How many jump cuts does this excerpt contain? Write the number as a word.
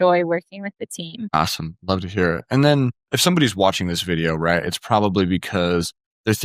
zero